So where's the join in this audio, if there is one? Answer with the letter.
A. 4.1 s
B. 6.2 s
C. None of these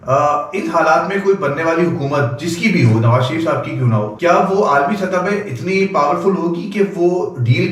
A